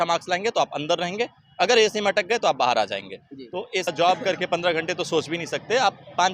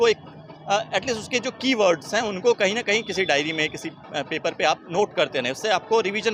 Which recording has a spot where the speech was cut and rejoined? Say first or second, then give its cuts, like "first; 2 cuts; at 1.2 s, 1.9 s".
first; 1 cut; at 3.9 s